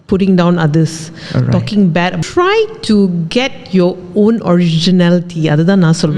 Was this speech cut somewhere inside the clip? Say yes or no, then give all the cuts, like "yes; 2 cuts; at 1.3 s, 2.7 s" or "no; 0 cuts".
yes; 1 cut; at 2.2 s